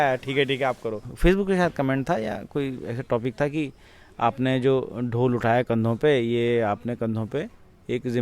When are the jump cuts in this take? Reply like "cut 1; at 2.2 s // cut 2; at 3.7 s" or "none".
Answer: cut 1; at 1.1 s

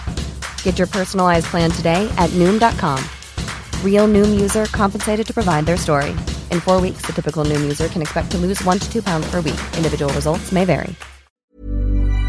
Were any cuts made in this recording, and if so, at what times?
cut 1; at 11.4 s

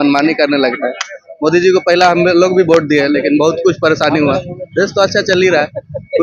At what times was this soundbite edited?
none

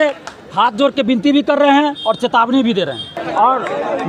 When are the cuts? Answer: cut 1; at 3.2 s

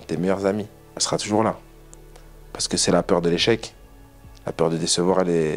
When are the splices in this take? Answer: cut 1; at 1.0 s

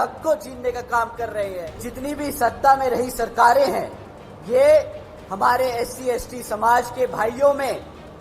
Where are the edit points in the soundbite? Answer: cut 1; at 1.9 s

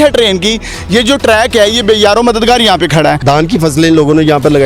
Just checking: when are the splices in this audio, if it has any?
cut 1; at 3.2 s

